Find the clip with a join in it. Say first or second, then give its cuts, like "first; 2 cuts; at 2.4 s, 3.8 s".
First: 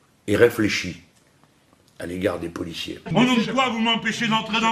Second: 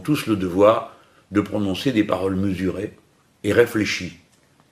first; 1 cut; at 3.0 s